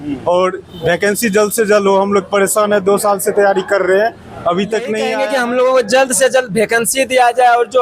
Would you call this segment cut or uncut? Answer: cut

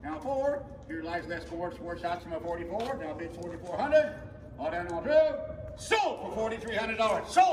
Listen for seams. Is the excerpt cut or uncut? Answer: uncut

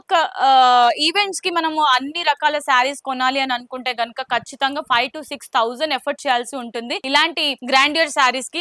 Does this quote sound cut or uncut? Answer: uncut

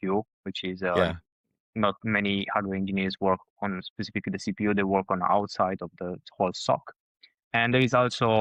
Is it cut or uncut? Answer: uncut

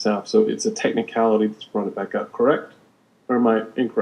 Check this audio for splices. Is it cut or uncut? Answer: uncut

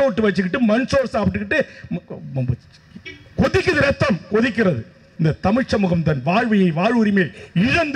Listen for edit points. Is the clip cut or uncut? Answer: cut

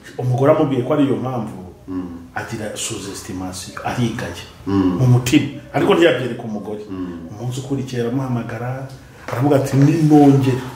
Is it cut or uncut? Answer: uncut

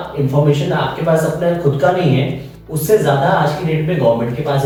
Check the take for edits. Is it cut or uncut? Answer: uncut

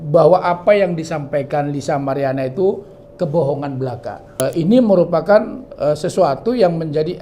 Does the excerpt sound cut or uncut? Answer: cut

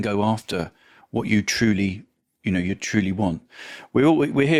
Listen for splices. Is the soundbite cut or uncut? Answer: uncut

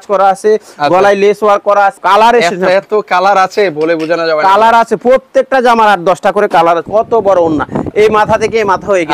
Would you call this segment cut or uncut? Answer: cut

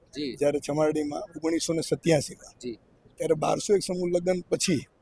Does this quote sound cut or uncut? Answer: uncut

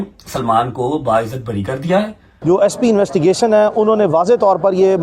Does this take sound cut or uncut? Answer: cut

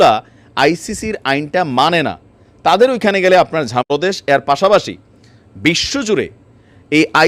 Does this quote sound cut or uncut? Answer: cut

